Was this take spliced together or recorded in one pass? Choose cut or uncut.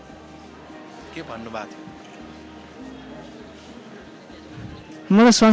uncut